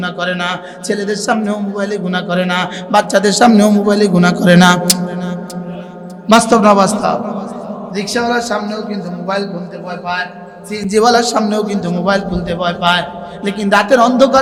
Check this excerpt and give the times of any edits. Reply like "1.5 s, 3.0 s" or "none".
none